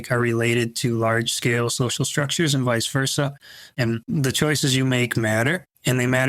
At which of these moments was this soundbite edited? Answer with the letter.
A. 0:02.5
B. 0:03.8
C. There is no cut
B